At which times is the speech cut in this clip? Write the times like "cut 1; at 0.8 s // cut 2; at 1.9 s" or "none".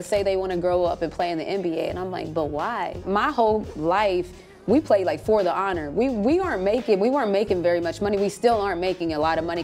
none